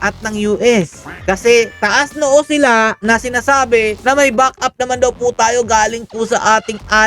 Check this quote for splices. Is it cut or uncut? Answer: cut